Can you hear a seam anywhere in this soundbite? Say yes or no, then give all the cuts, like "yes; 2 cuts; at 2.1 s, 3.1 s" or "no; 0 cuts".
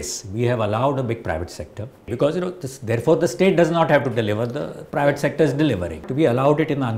yes; 2 cuts; at 2.1 s, 6.1 s